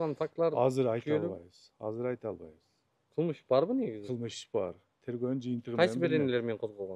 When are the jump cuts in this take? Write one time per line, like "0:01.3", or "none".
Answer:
none